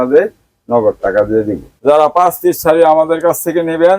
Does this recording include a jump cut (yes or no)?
yes